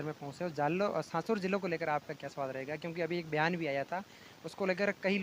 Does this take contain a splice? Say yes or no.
no